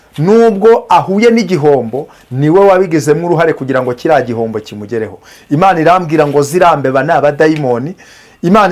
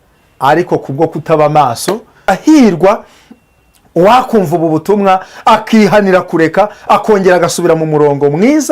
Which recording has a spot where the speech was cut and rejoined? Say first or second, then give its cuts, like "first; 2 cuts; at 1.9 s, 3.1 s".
second; 1 cut; at 2.3 s